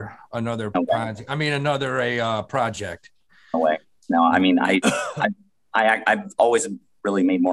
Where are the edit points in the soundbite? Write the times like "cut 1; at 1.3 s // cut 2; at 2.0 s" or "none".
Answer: none